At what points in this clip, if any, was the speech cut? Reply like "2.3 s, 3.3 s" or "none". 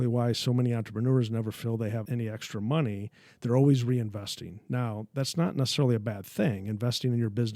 2.0 s